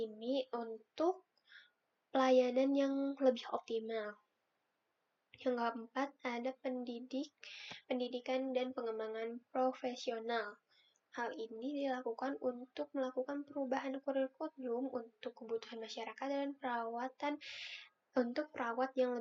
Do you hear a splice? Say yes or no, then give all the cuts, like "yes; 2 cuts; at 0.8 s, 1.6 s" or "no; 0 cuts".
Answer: no; 0 cuts